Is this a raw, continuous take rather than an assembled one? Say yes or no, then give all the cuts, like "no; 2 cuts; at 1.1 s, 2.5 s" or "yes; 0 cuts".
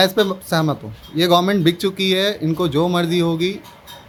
yes; 0 cuts